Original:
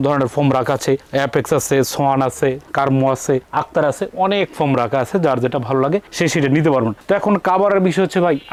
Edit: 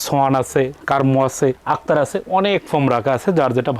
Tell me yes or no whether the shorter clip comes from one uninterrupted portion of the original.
yes